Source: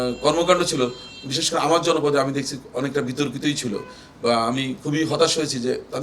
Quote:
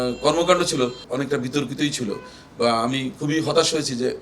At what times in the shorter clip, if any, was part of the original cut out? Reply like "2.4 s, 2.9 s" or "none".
1.0 s

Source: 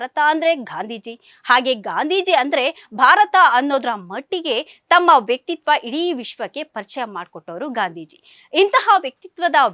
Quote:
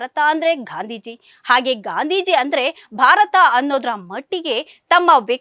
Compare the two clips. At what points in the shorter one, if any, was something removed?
none

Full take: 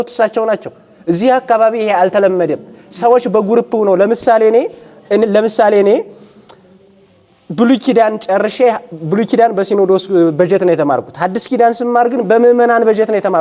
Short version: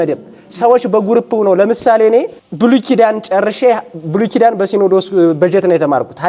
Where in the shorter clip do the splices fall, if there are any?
2.4 s

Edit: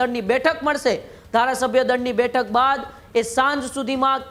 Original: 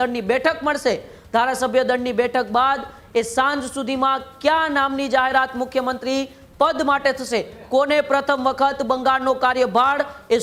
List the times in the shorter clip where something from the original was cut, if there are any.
none

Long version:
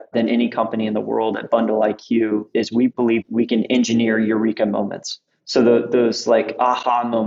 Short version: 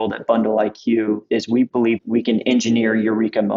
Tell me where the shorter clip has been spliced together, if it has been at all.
none

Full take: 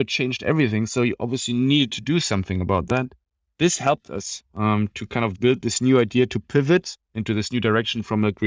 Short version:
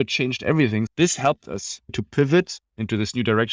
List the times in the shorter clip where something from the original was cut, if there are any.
0.9 s, 1.9 s

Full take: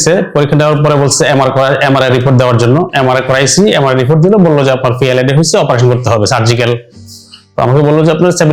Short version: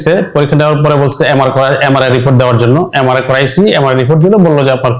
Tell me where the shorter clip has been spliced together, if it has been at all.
none

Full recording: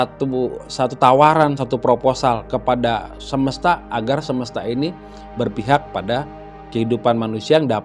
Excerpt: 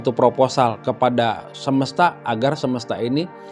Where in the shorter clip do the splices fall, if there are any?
none

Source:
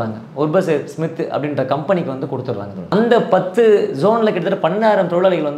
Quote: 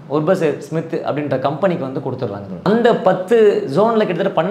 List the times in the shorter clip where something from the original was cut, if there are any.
none

